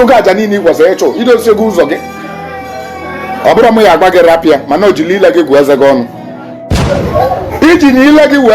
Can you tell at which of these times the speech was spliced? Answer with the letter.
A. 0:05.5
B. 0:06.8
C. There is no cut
B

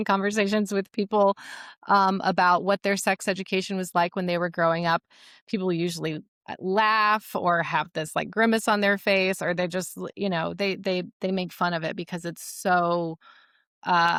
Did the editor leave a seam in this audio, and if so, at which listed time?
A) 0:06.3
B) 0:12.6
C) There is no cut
C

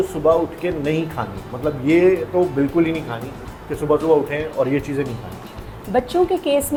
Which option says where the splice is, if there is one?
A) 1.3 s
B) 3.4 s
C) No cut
C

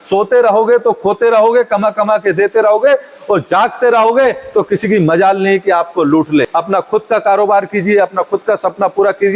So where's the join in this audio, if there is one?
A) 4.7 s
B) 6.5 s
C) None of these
B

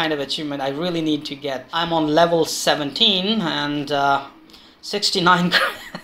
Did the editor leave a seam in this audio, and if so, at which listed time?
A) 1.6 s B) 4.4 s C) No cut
A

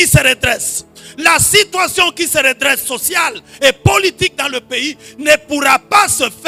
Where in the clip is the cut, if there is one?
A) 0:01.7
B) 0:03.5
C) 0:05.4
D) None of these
D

